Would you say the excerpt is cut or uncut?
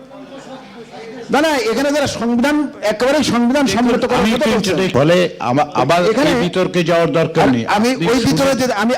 cut